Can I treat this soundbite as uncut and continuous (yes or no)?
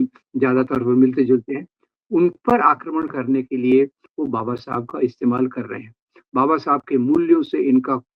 yes